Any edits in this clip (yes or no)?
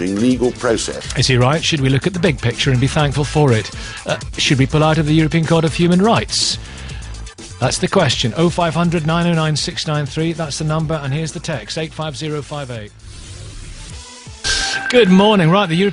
yes